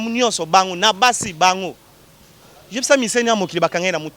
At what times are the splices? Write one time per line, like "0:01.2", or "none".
none